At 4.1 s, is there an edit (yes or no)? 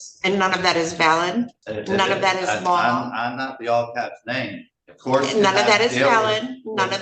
no